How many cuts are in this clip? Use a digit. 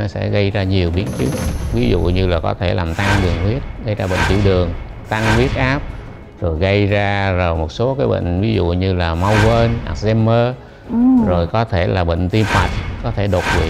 0